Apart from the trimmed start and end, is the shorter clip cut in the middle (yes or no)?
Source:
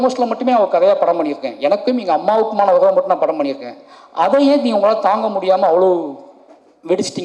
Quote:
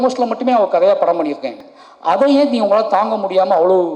yes